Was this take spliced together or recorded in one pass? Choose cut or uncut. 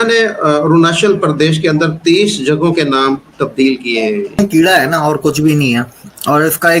cut